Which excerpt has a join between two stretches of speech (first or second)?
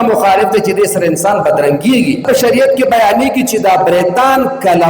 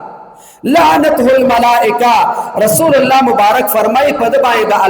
first